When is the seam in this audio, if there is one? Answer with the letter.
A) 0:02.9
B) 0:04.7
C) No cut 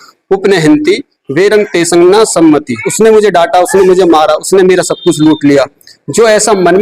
A